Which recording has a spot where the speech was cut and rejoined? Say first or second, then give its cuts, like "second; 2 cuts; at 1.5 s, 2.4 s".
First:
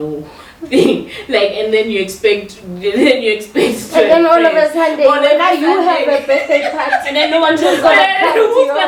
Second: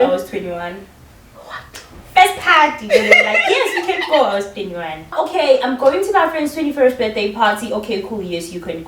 second; 1 cut; at 5.1 s